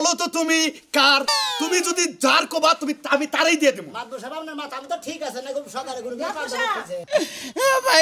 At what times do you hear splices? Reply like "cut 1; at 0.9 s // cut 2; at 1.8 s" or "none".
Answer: cut 1; at 7.0 s